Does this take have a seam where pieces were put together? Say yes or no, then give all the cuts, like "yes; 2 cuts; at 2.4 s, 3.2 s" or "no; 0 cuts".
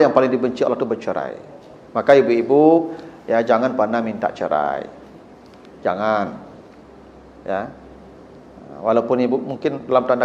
no; 0 cuts